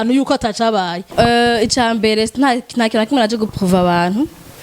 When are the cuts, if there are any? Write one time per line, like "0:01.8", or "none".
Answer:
0:01.1